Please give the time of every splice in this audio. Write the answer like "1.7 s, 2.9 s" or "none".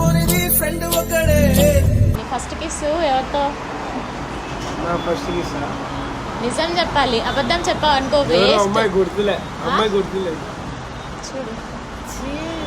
2.2 s